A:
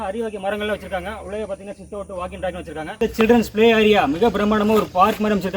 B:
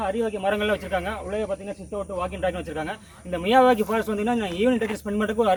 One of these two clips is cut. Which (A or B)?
A